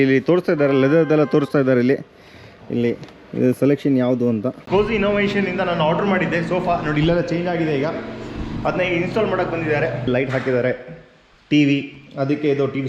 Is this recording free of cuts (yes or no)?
no